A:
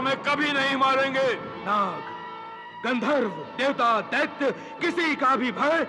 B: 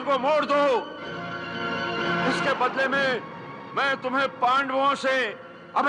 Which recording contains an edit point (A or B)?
A